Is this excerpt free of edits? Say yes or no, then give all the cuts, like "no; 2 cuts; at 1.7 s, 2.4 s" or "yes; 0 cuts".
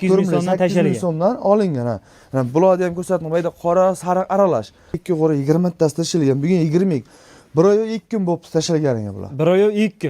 no; 1 cut; at 5.0 s